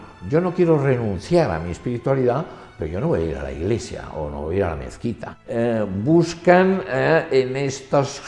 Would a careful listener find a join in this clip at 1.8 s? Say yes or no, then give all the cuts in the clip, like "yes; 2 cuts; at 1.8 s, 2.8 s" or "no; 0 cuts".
no; 1 cut; at 5.3 s